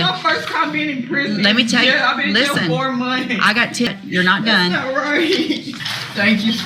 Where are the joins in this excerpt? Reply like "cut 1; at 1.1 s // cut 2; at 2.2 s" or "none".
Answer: cut 1; at 3.9 s // cut 2; at 5.7 s